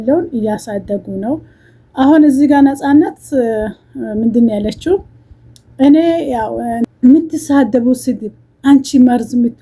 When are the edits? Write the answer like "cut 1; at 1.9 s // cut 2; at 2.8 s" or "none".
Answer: cut 1; at 6.9 s